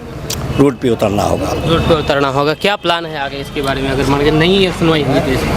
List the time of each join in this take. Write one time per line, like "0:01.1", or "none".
none